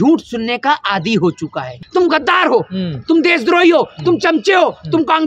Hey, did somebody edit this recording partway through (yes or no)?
yes